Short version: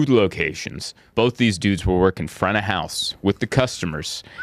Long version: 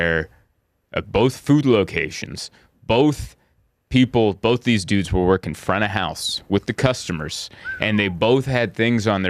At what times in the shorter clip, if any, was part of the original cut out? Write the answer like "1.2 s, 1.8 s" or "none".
1.1 s